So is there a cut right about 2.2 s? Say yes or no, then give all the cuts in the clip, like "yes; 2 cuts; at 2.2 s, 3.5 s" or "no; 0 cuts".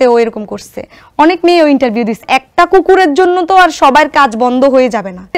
yes; 1 cut; at 2.2 s